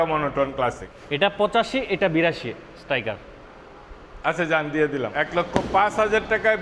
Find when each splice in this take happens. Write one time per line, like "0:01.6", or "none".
0:00.9
0:05.1